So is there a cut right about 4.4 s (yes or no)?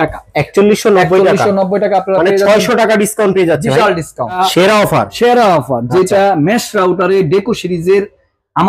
yes